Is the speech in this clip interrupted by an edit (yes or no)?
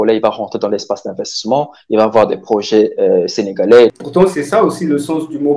yes